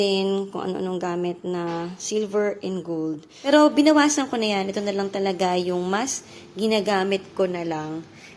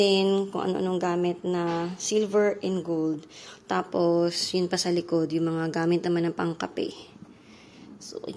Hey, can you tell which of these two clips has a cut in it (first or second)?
first